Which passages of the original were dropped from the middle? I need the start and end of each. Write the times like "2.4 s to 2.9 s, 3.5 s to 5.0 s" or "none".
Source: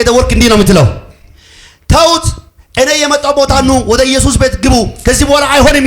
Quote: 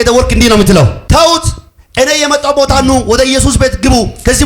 1.0 s to 1.8 s